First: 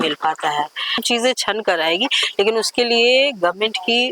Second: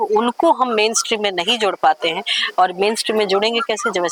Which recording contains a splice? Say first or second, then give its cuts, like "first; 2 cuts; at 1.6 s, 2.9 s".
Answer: first; 1 cut; at 0.9 s